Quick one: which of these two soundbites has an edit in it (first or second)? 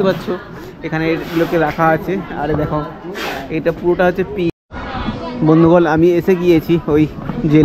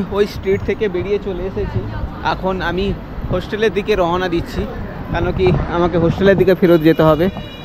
first